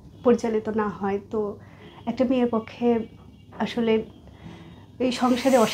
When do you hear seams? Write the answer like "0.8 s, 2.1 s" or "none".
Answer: none